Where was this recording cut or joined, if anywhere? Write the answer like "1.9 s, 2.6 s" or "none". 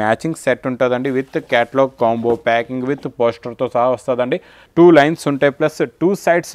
4.6 s